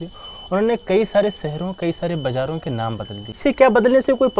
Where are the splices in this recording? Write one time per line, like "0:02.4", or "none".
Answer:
0:03.4